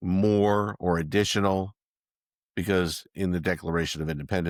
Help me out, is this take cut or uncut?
uncut